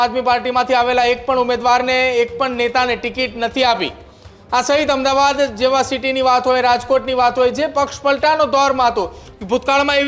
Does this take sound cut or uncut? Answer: uncut